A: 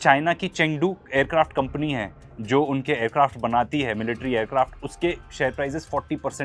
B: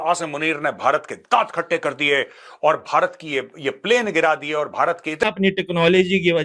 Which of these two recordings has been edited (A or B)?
B